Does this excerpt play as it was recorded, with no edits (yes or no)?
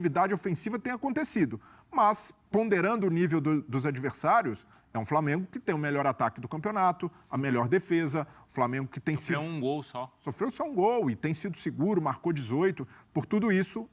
yes